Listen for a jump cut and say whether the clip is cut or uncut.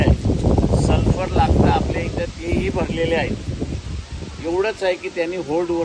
uncut